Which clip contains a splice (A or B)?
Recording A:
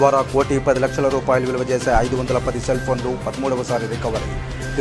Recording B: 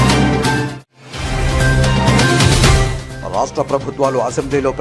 B